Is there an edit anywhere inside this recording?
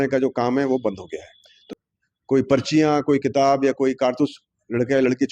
yes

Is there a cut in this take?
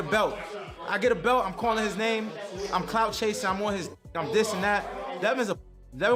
no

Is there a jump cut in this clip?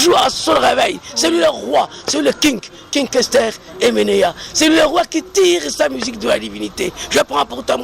no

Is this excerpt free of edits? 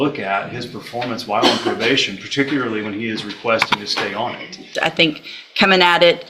no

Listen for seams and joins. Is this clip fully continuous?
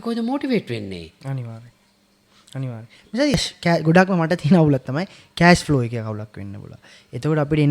no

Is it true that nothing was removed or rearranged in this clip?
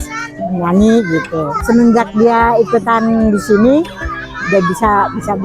no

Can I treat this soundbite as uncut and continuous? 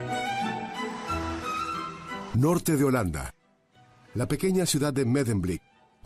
no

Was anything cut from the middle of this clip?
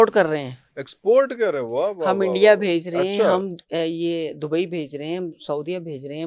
no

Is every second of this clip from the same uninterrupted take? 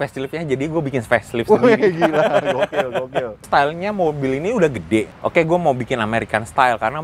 no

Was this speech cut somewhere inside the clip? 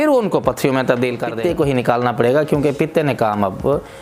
yes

